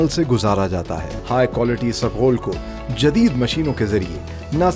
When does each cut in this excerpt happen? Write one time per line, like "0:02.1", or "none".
0:01.1